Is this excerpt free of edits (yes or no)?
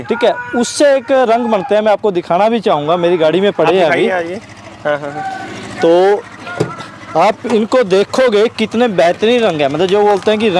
yes